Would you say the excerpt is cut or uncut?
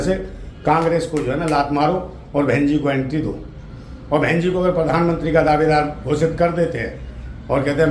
uncut